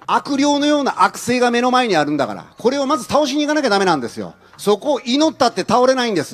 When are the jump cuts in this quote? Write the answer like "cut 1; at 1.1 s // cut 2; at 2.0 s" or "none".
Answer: none